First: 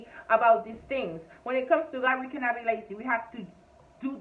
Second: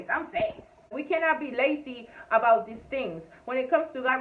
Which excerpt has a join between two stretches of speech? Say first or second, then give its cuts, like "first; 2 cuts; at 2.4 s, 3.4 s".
second; 1 cut; at 1.0 s